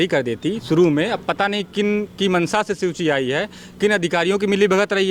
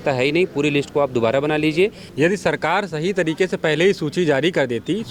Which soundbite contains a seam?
second; 1 cut; at 2.0 s

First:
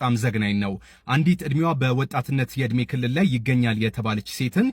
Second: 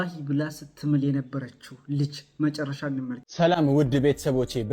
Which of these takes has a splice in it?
second; 1 cut; at 3.2 s

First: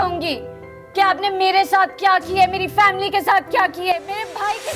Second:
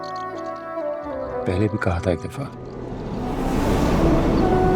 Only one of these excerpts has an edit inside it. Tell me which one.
second; 1 cut; at 1.4 s

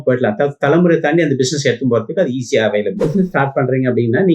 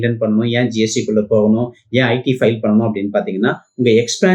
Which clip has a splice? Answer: first; 1 cut; at 3.0 s

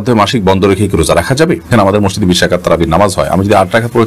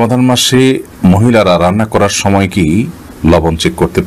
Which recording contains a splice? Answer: first; 1 cut; at 1.8 s

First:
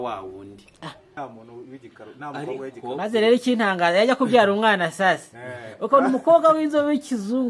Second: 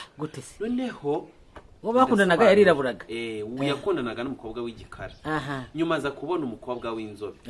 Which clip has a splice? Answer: first; 1 cut; at 1.0 s

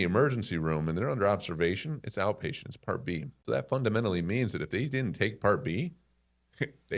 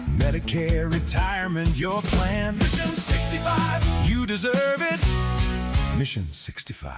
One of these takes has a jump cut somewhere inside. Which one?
first; 1 cut; at 3.3 s

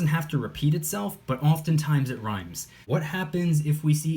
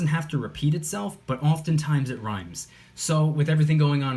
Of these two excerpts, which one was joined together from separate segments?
first; 1 cut; at 2.8 s

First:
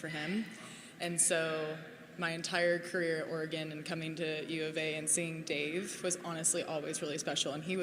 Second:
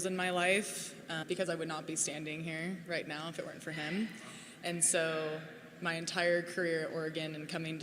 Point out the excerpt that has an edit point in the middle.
second; 1 cut; at 1.2 s

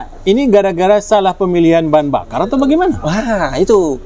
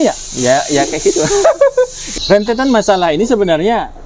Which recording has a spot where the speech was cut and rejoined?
second; 1 cut; at 2.1 s

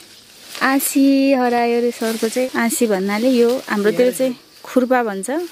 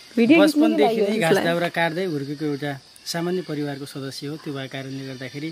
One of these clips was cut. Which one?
first; 1 cut; at 2.4 s

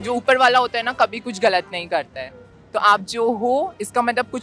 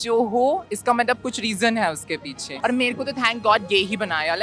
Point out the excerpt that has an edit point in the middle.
second; 1 cut; at 2.5 s

